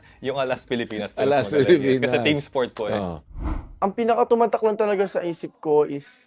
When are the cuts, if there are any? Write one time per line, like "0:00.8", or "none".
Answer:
0:03.2